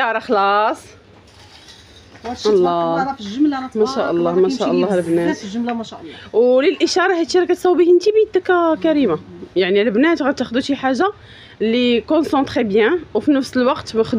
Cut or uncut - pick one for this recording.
uncut